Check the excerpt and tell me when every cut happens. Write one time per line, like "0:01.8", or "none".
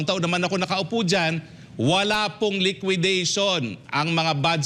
none